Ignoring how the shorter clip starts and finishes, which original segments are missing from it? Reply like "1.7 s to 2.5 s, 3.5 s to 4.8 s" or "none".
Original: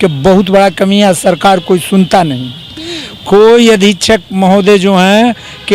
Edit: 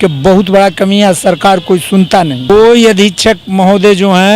2.4 s to 3.2 s